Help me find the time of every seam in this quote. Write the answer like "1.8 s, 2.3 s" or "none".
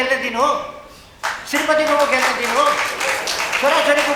none